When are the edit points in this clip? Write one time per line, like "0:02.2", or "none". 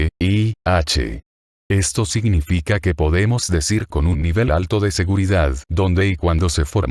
0:01.2